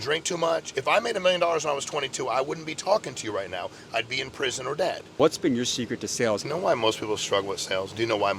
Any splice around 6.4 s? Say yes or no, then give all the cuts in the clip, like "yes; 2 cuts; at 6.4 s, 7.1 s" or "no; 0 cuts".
yes; 2 cuts; at 5.1 s, 6.4 s